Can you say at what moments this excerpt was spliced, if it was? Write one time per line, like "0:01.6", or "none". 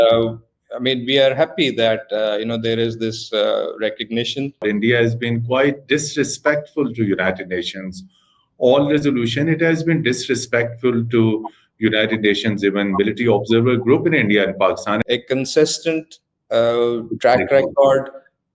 0:04.6
0:15.0